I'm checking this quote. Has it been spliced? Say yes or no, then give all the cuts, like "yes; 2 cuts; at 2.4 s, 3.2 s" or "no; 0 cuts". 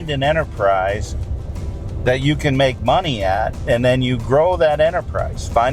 no; 0 cuts